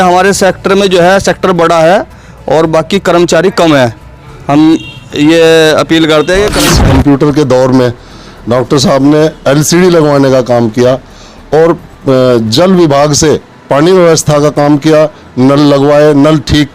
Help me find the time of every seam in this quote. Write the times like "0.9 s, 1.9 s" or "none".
6.6 s